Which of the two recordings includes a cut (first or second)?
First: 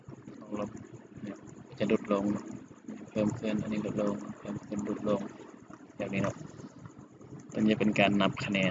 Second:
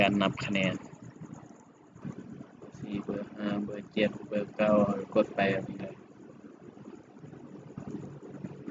second